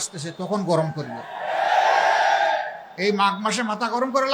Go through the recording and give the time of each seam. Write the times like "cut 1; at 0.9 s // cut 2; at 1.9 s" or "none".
none